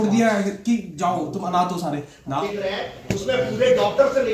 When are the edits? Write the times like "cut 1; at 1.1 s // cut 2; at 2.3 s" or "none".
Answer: cut 1; at 2.4 s